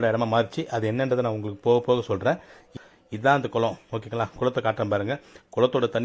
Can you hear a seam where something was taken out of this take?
yes; 1 cut; at 2.8 s

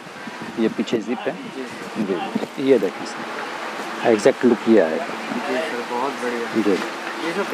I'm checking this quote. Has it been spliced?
yes; 1 cut; at 2.5 s

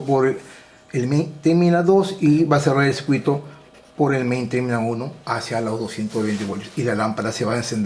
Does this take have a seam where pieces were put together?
no; 0 cuts

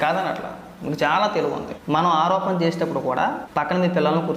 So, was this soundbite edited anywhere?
yes; 2 cuts; at 1.7 s, 3.4 s

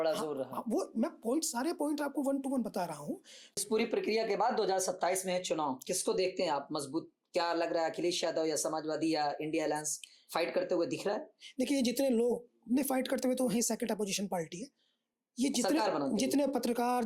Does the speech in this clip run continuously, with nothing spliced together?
no; 1 cut; at 3.6 s

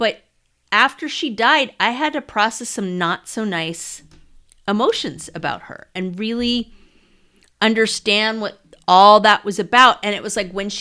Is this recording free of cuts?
yes; 0 cuts

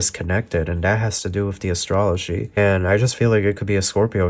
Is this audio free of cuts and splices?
no; 1 cut; at 2.6 s

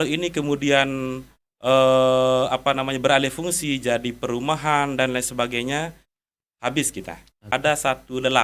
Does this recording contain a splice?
yes; 1 cut; at 7.5 s

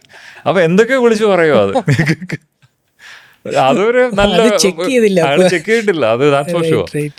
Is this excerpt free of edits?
yes; 0 cuts

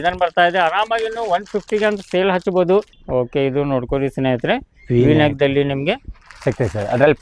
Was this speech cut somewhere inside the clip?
yes; 1 cut; at 3.0 s

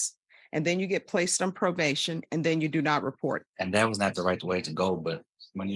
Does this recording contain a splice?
yes; 1 cut; at 3.5 s

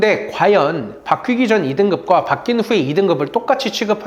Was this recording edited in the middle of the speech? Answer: no; 0 cuts

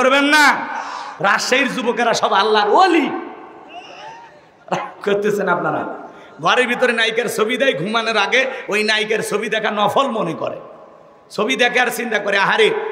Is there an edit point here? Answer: yes; 1 cut; at 1.1 s

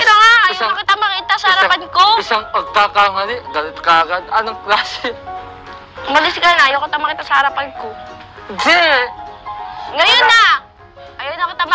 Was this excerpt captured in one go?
yes; 0 cuts

